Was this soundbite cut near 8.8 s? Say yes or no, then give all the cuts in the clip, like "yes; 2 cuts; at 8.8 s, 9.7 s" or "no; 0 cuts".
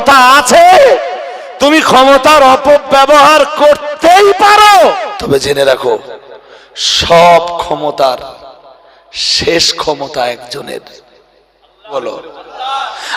no; 2 cuts; at 5.1 s, 12.0 s